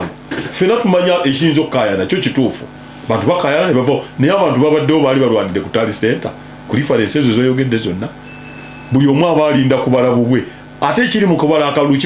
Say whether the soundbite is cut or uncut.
uncut